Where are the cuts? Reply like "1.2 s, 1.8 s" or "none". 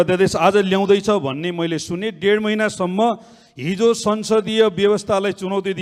none